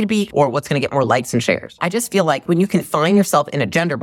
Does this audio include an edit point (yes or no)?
yes